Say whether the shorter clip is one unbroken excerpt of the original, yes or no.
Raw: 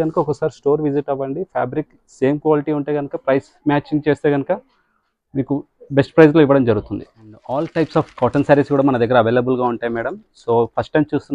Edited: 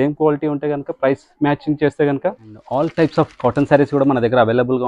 no